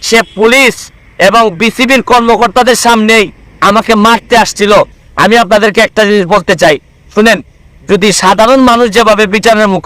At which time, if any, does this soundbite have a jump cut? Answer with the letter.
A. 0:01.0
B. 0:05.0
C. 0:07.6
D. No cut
B